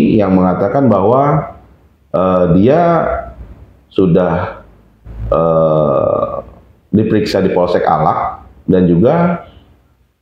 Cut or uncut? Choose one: uncut